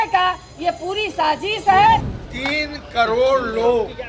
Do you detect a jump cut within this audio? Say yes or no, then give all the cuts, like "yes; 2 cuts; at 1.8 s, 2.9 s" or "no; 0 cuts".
yes; 1 cut; at 2.1 s